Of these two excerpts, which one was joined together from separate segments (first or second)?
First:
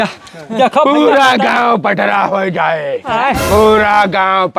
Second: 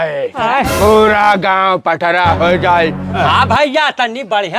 second